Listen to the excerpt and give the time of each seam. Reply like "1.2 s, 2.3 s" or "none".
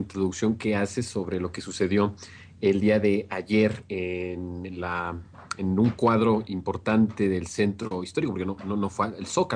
3.1 s